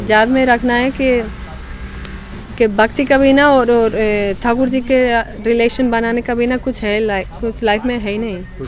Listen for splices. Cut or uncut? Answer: uncut